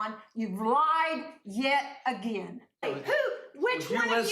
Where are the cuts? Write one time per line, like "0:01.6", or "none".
0:02.8